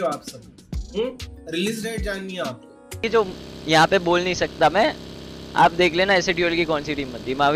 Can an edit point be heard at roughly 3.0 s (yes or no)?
yes